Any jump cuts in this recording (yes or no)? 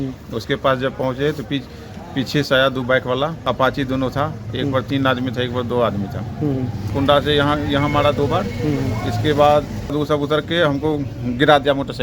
yes